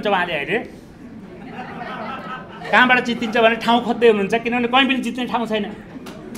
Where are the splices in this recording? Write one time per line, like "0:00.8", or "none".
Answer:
none

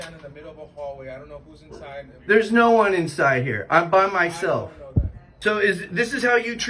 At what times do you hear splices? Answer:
0:05.2

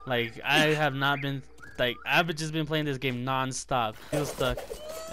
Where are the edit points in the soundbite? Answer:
0:04.1

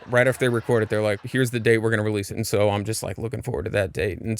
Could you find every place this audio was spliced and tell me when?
0:01.2
0:02.3

